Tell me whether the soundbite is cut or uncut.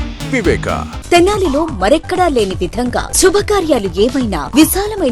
cut